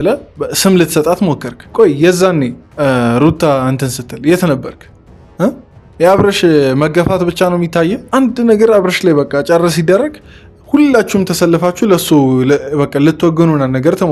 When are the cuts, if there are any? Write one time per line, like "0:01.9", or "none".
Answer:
none